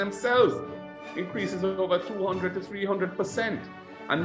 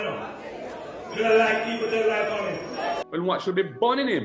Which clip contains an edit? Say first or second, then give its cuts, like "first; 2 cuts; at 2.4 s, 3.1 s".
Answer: second; 1 cut; at 3.0 s